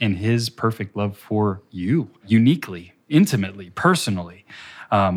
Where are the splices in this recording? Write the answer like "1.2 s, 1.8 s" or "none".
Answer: 2.2 s